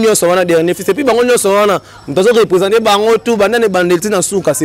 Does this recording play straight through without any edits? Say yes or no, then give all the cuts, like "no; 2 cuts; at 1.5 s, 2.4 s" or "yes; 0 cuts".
yes; 0 cuts